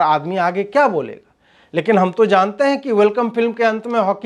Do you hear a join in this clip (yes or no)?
no